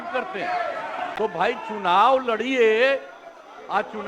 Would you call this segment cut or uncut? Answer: cut